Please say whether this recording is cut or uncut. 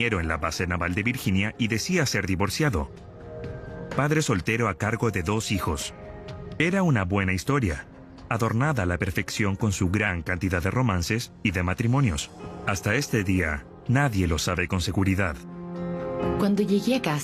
cut